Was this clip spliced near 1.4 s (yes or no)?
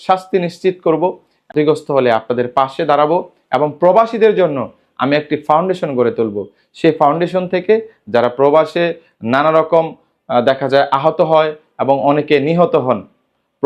yes